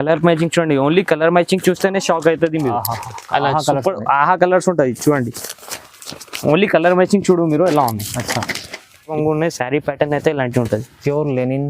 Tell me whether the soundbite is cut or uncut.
cut